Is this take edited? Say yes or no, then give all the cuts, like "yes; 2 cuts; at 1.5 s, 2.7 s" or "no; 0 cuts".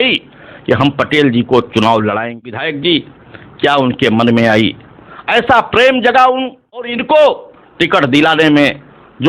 yes; 2 cuts; at 2.7 s, 7.0 s